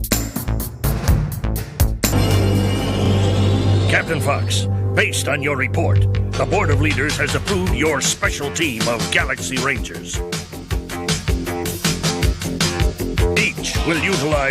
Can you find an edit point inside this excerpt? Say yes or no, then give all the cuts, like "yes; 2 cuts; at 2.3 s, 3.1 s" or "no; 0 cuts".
yes; 1 cut; at 2.1 s